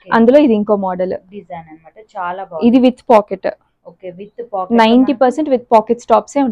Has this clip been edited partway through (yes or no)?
no